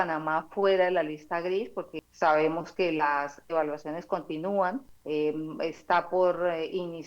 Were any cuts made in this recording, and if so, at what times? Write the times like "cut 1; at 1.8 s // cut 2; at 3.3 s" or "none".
cut 1; at 2.0 s // cut 2; at 4.9 s